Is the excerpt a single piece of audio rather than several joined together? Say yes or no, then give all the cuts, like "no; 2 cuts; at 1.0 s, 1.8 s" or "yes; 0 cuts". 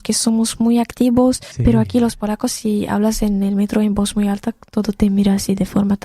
no; 1 cut; at 1.5 s